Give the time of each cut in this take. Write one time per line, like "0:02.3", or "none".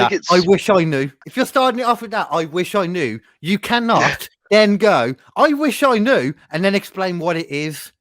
0:01.2